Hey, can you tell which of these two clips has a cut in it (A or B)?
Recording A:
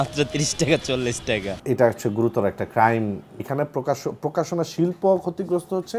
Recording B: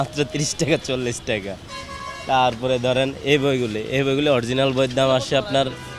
A